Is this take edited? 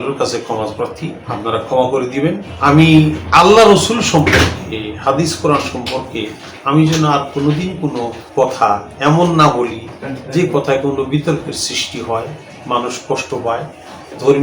yes; 4 cuts; at 1.2 s, 2.5 s, 3.2 s, 8.2 s

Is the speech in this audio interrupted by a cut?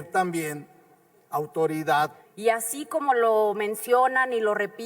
yes; 1 cut; at 2.2 s

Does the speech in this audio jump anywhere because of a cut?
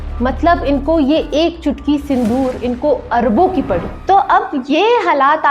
yes; 1 cut; at 3.9 s

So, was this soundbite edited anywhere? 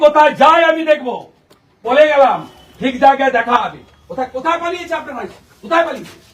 yes; 1 cut; at 1.8 s

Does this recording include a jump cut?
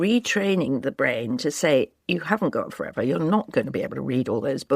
yes; 1 cut; at 0.9 s

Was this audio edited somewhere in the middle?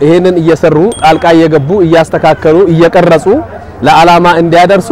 no; 0 cuts

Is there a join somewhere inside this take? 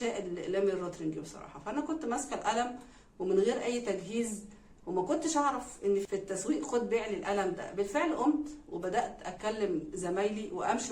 yes; 1 cut; at 6.0 s

